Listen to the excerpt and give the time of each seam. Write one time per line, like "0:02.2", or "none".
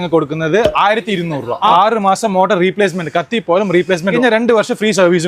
0:01.7
0:04.1